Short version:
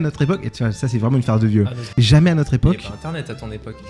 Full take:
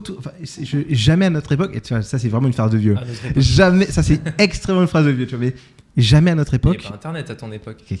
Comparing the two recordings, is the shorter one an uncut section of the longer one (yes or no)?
no